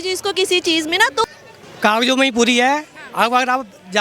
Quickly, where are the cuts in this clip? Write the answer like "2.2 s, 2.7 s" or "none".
1.2 s